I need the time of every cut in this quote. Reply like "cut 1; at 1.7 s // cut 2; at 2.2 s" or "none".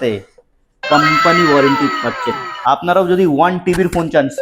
cut 1; at 2.5 s